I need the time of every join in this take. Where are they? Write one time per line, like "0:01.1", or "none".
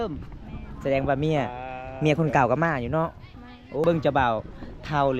0:03.8

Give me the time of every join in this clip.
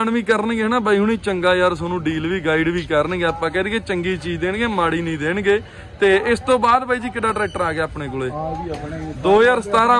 none

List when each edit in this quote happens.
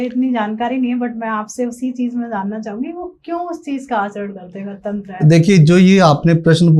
none

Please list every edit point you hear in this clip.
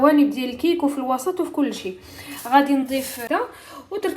0:03.2

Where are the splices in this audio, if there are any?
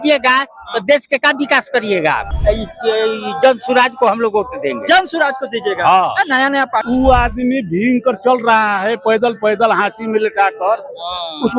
0:02.3
0:06.8

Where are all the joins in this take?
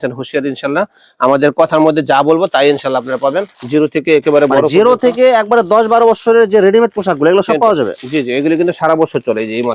none

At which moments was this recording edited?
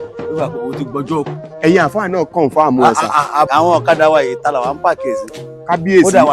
0:01.4
0:03.5

